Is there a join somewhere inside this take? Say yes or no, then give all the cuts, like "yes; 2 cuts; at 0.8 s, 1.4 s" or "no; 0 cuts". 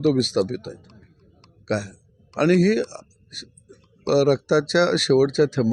no; 0 cuts